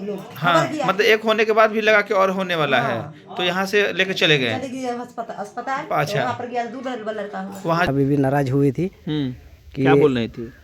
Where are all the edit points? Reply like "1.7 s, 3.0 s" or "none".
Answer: 7.9 s